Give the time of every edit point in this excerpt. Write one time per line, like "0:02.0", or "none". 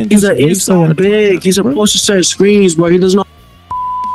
none